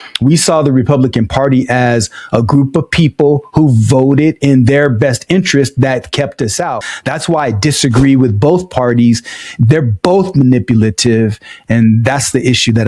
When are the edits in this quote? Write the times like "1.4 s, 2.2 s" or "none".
6.9 s